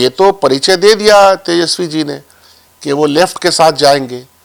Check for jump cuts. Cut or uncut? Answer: uncut